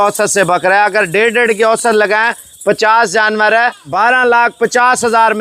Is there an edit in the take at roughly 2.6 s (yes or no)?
no